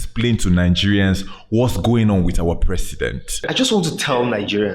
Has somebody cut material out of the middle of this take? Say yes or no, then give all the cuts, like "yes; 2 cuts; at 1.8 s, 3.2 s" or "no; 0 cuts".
yes; 1 cut; at 3.5 s